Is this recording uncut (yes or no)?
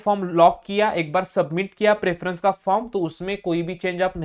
yes